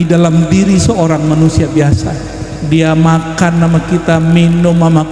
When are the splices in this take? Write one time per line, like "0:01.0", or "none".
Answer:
none